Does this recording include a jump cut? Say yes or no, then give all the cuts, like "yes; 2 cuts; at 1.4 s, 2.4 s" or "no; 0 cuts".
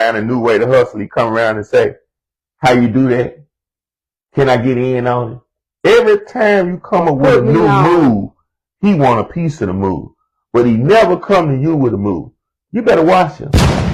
no; 0 cuts